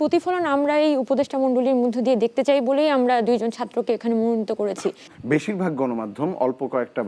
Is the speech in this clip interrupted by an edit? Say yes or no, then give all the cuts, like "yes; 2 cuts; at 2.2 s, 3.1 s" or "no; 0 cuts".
yes; 1 cut; at 5.0 s